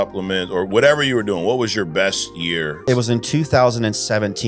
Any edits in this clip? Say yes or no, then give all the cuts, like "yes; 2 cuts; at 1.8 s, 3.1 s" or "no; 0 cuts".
yes; 1 cut; at 2.8 s